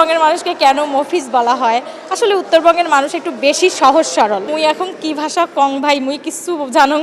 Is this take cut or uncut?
cut